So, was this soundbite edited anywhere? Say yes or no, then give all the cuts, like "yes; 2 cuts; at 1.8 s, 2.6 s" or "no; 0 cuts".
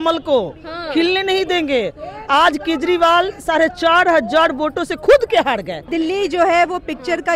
yes; 1 cut; at 5.9 s